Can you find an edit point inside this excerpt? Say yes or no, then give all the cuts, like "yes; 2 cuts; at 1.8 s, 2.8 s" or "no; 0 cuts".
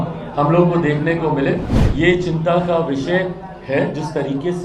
yes; 1 cut; at 1.8 s